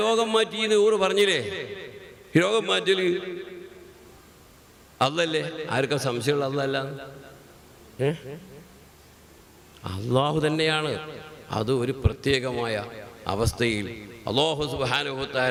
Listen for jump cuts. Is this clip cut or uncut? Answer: uncut